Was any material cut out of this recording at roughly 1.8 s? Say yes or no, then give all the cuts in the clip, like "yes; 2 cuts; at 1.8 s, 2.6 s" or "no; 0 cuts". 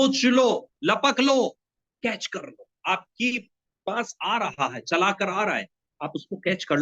no; 0 cuts